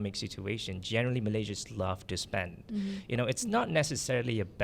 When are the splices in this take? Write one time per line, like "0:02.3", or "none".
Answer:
none

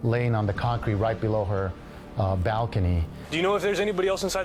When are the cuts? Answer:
0:03.2

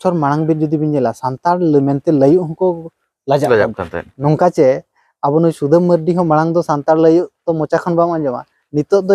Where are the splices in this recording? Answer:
0:04.1

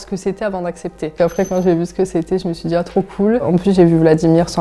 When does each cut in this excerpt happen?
0:01.1
0:03.4

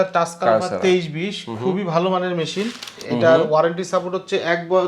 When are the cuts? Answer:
0:03.0

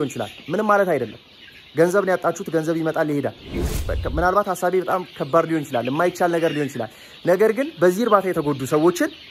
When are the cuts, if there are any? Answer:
0:03.6

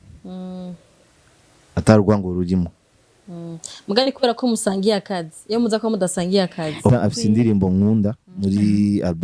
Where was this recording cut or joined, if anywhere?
0:06.8

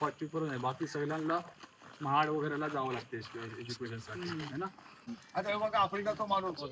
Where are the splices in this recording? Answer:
0:05.2

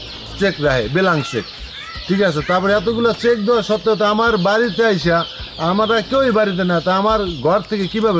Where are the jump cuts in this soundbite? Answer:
none

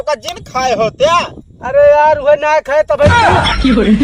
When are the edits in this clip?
0:03.1

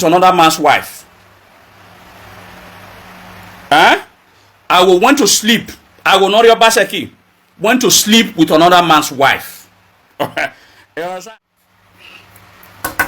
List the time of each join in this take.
0:11.2

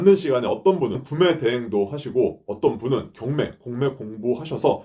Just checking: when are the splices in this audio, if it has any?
0:01.1

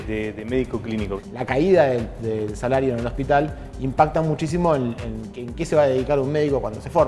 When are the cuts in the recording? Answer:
0:01.2

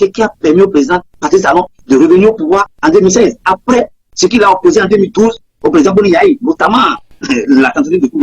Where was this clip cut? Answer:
0:01.5
0:02.7

